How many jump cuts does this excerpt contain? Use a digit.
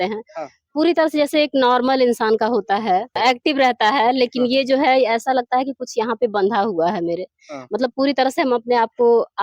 1